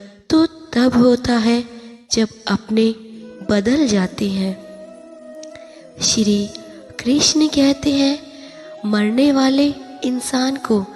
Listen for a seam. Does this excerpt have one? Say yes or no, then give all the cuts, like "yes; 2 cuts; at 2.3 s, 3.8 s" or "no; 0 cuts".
yes; 2 cuts; at 4.6 s, 5.9 s